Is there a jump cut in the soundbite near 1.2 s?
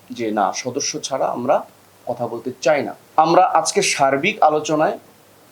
no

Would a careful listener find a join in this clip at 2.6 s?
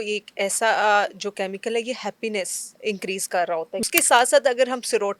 yes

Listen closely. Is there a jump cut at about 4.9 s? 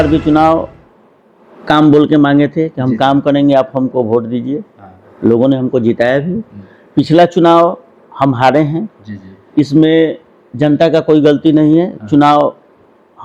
no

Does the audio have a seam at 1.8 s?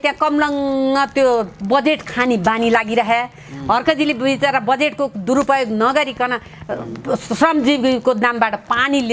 no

